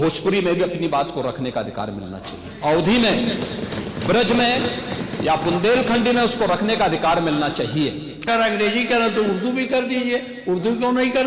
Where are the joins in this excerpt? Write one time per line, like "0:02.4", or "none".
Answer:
0:08.3